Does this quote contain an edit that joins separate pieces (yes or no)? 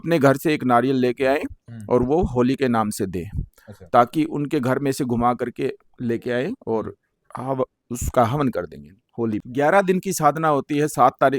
yes